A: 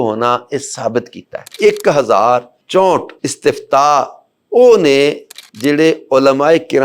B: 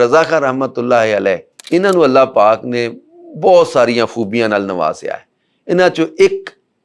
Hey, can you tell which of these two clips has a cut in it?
A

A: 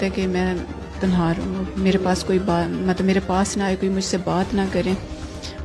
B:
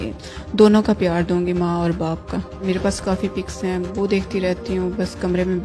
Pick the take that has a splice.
B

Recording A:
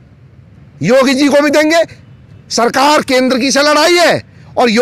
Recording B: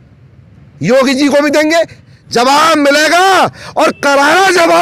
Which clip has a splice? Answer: B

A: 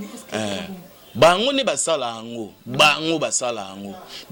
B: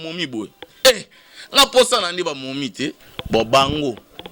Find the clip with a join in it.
B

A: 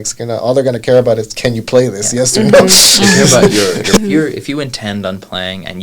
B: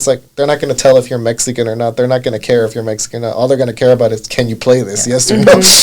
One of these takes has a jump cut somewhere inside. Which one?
A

